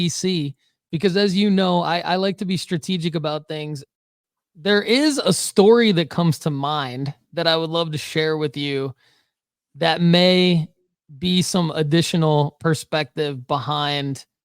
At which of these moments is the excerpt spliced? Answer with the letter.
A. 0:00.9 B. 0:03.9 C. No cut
B